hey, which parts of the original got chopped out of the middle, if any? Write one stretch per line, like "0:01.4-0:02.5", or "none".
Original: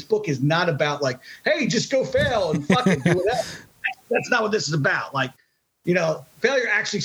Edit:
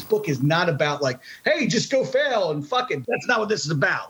0:02.6-0:03.6